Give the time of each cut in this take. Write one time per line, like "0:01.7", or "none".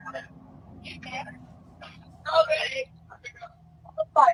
none

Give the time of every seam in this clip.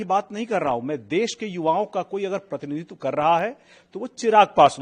none

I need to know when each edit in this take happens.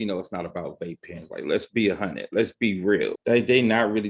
0:03.2

